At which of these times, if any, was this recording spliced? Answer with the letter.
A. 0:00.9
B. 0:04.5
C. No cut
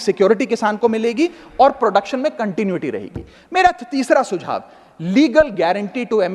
C